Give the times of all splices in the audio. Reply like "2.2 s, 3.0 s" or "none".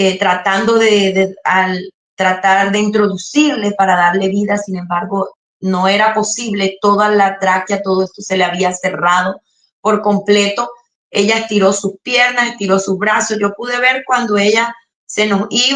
none